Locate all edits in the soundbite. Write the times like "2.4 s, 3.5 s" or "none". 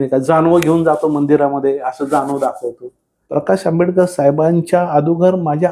3.2 s

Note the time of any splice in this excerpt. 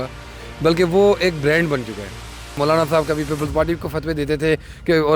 2.5 s

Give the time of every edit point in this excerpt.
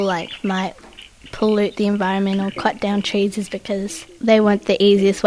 4.0 s

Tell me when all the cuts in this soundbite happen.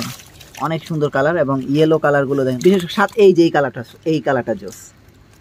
2.6 s

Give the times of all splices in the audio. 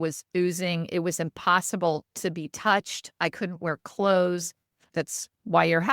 4.9 s

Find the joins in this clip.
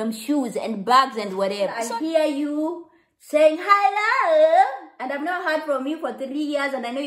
1.8 s

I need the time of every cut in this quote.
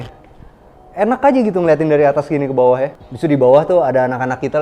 3.0 s

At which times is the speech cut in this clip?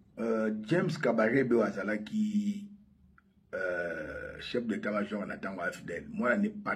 none

